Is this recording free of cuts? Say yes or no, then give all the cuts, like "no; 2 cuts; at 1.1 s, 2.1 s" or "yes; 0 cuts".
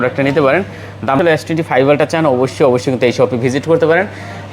no; 1 cut; at 1.2 s